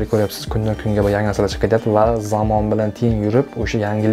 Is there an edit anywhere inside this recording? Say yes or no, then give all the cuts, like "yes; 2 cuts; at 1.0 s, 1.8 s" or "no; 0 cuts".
no; 0 cuts